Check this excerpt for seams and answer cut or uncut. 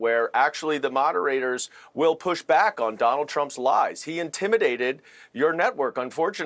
uncut